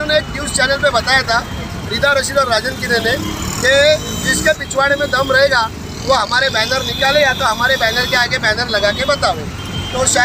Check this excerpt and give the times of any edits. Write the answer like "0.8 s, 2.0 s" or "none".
none